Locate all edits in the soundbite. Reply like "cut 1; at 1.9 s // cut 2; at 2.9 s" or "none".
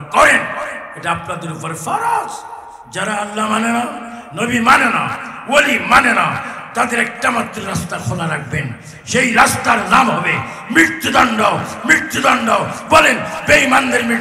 none